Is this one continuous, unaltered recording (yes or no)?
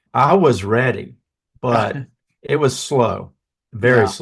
no